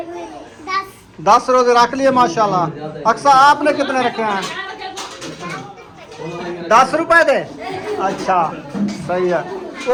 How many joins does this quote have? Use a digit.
0